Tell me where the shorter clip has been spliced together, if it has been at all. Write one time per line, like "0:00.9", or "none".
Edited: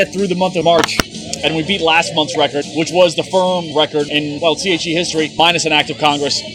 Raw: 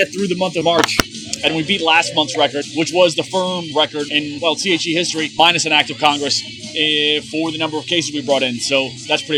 none